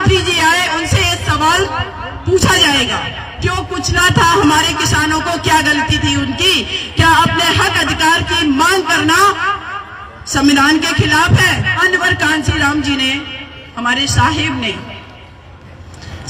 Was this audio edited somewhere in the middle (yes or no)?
yes